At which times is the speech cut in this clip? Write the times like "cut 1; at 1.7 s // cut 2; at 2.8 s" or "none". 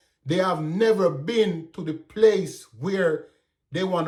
none